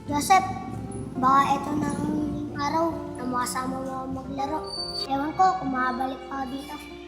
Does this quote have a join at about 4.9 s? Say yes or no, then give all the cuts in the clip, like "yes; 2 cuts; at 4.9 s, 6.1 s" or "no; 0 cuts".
yes; 1 cut; at 4.9 s